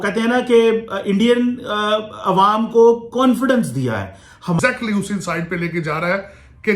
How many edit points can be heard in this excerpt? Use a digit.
1